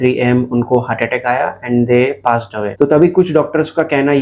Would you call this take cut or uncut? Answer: uncut